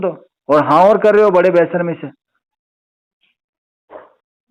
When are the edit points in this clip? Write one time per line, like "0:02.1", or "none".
none